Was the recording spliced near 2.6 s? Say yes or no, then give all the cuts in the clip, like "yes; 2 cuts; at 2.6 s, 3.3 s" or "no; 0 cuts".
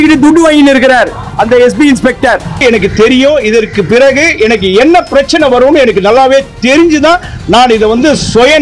yes; 1 cut; at 2.6 s